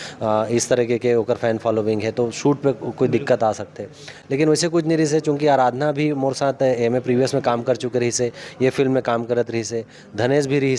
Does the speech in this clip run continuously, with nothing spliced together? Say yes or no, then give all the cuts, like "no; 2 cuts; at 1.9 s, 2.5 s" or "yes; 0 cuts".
yes; 0 cuts